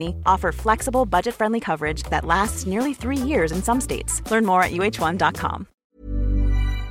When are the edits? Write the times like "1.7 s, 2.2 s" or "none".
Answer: 5.7 s